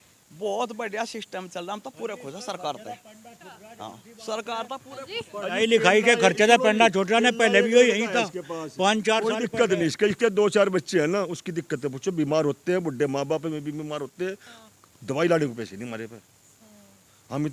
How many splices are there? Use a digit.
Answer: 0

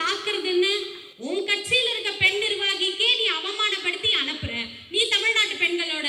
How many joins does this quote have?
0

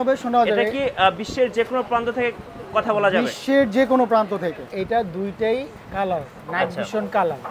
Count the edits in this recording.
1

